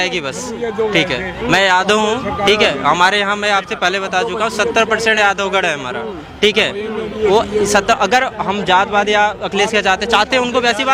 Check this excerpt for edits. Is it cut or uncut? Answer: uncut